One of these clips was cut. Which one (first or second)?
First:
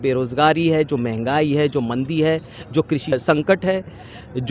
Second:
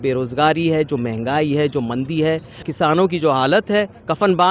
second